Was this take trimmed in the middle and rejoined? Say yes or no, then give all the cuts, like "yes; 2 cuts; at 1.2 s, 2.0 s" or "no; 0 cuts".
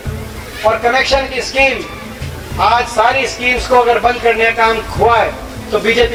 no; 0 cuts